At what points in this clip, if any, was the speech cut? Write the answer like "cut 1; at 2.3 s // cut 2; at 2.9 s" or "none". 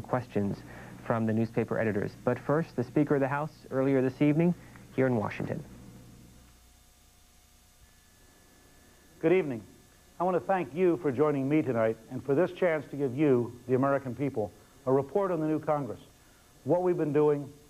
cut 1; at 2.7 s